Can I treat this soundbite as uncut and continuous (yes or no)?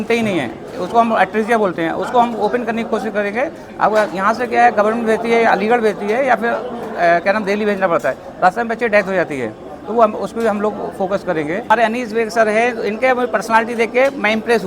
no